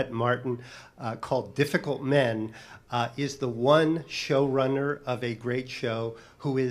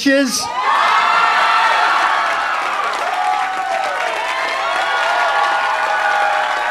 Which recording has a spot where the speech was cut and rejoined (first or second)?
first